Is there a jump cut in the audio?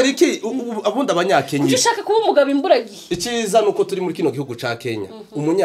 no; 0 cuts

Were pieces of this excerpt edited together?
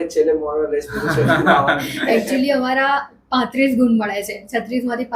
no; 0 cuts

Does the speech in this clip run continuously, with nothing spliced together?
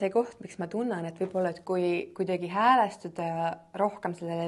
yes; 0 cuts

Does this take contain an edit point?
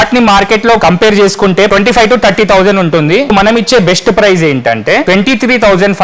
yes; 4 cuts; at 0.8 s, 1.7 s, 3.3 s, 5.0 s

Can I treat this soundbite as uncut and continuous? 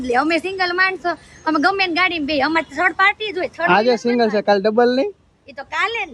yes; 0 cuts

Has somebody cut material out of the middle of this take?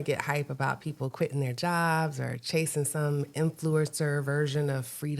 no; 0 cuts

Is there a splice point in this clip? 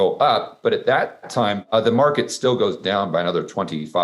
yes; 1 cut; at 1.6 s

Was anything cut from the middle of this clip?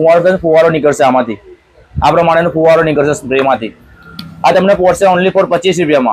no; 0 cuts

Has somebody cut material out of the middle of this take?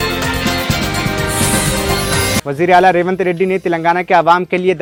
no; 0 cuts

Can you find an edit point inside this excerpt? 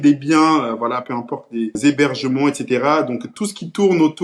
yes; 1 cut; at 1.7 s

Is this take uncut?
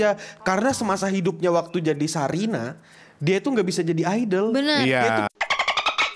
yes; 0 cuts

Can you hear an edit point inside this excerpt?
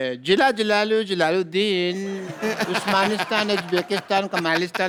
no; 0 cuts

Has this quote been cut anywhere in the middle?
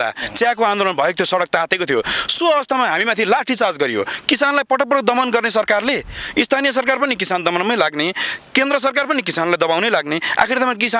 no; 0 cuts

